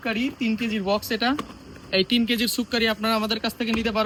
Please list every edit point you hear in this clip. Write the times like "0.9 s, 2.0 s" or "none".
none